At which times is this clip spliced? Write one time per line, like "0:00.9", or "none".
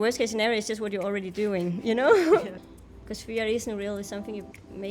0:02.6